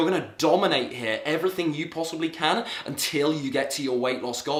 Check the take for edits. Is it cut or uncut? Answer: uncut